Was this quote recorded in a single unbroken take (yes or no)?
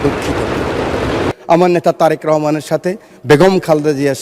no